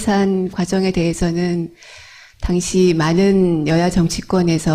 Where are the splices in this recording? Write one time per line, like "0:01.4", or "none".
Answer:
0:03.5